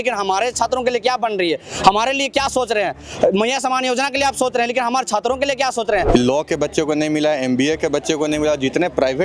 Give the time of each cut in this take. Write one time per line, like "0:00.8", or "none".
0:06.1